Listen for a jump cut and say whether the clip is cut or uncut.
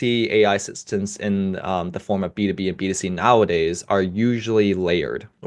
uncut